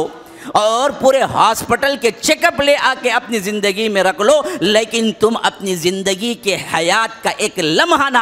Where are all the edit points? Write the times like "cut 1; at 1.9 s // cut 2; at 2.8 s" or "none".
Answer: none

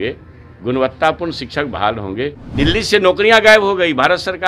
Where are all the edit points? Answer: cut 1; at 2.4 s

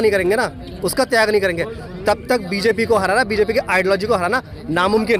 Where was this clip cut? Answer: none

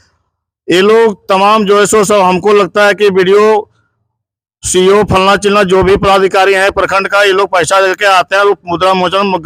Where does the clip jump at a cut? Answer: none

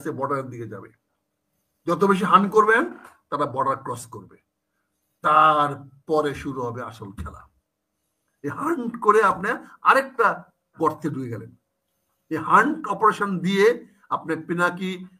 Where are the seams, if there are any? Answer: none

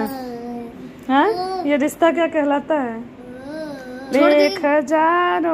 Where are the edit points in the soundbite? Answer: none

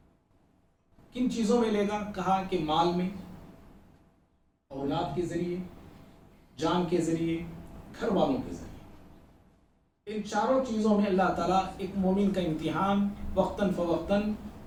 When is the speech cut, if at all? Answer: none

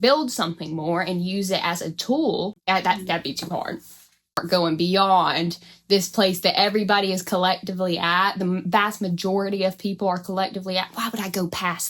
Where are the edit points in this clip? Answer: cut 1; at 2.6 s // cut 2; at 4.4 s

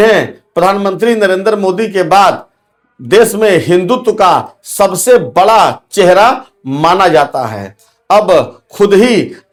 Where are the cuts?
none

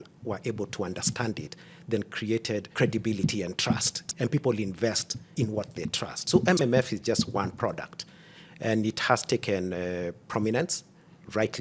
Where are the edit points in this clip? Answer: cut 1; at 6.2 s

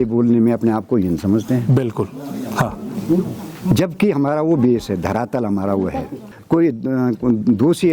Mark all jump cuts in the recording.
cut 1; at 6.2 s

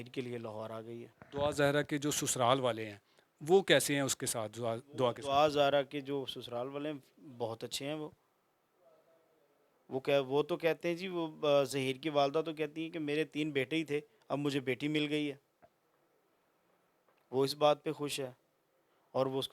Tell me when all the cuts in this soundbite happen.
cut 1; at 1.1 s

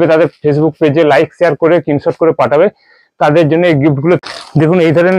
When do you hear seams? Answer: cut 1; at 4.2 s

